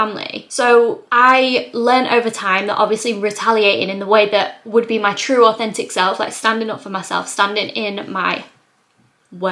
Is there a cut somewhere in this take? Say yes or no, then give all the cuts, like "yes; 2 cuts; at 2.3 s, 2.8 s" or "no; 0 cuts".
no; 0 cuts